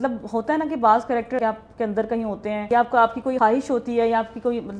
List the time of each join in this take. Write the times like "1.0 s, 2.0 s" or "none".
1.4 s, 2.7 s, 3.4 s